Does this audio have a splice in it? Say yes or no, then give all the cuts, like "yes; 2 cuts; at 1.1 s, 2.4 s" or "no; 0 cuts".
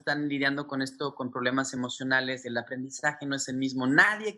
no; 0 cuts